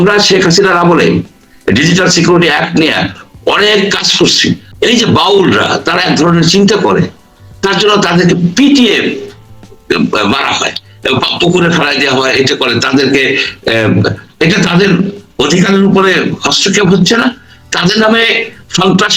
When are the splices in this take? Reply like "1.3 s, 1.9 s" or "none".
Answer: 4.7 s